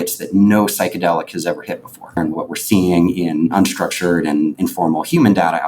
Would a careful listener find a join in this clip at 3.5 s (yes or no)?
yes